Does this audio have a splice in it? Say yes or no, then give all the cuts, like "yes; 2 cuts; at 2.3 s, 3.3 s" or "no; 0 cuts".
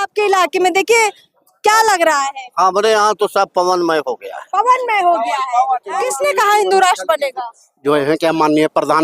yes; 1 cut; at 6.0 s